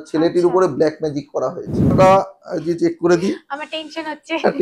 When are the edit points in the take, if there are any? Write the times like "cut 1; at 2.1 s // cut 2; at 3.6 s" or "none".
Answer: cut 1; at 1.9 s